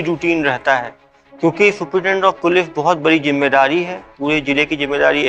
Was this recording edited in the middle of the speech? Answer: no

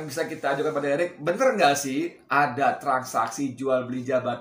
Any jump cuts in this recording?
no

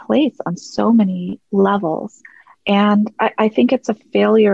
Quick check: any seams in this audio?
no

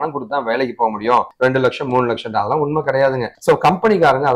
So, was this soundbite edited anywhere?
no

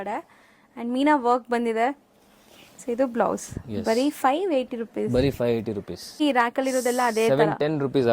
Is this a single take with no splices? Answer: no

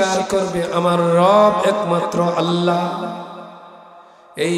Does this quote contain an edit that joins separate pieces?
no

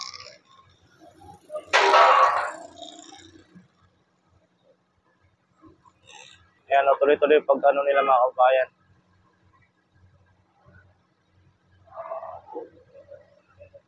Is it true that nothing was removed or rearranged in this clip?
no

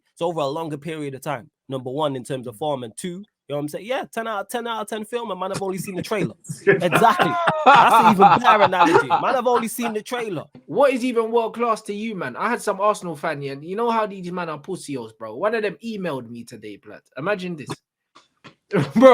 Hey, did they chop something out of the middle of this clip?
yes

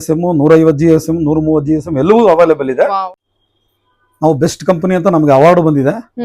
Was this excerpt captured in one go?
no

